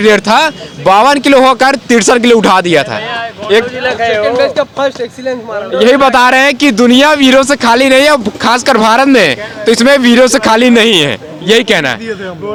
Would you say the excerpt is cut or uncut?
uncut